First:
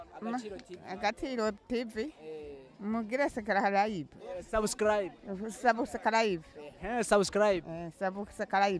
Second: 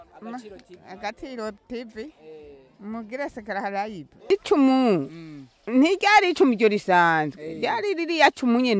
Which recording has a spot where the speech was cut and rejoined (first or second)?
second